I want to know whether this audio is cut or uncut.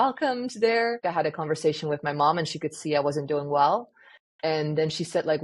cut